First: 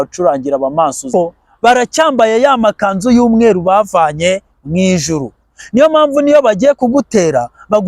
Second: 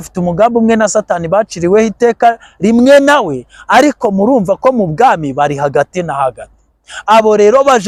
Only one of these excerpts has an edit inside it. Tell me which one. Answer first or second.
first